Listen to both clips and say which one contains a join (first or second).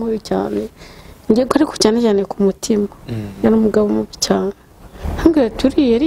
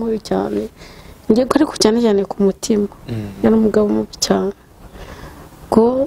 first